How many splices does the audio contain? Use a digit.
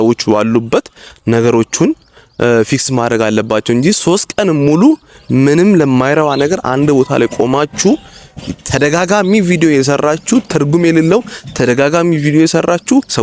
0